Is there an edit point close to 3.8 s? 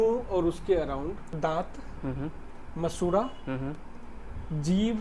no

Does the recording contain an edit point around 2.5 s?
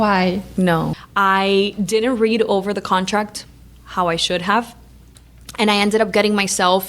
no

